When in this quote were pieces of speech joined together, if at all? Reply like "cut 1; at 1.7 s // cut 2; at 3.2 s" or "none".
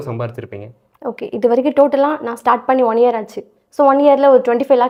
none